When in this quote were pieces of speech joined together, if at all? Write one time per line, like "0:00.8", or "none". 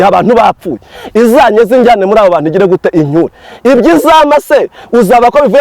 none